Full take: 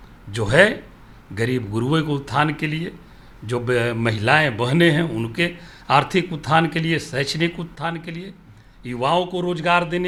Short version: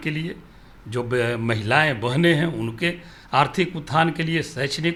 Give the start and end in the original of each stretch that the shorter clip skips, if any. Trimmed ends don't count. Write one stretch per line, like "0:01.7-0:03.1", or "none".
none